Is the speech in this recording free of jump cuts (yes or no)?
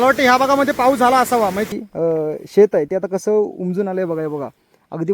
no